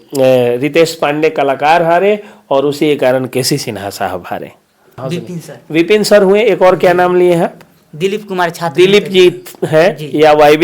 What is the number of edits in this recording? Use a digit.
1